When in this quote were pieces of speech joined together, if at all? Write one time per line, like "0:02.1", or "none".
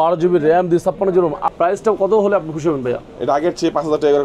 0:01.4